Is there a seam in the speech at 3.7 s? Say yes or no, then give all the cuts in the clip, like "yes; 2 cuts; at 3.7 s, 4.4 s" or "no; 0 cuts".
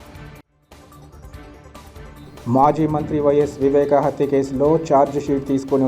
no; 1 cut; at 2.0 s